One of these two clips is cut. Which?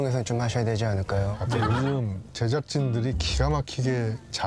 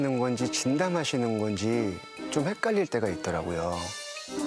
first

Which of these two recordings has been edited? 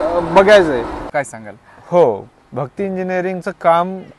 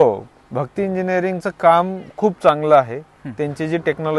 first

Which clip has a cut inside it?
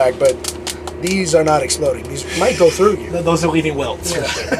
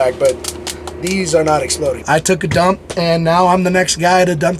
second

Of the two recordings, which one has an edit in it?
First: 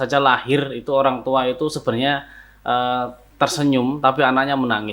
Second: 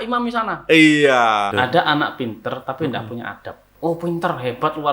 second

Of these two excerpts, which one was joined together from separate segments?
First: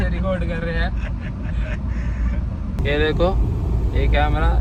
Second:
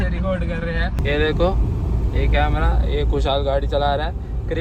second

